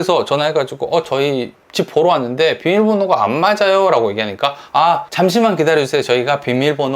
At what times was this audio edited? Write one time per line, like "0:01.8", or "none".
0:05.1